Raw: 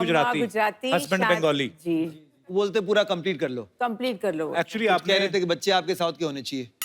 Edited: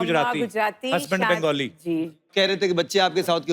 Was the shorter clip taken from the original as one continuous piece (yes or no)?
no